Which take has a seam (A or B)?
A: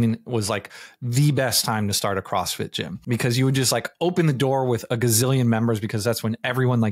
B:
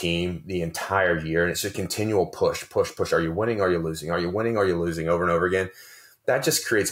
A